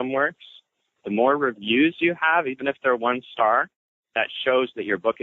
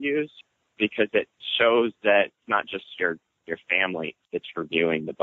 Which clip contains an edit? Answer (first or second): second